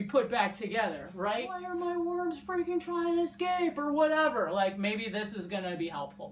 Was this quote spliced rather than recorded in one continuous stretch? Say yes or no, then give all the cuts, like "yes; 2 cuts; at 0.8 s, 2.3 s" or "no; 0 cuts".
yes; 1 cut; at 1.6 s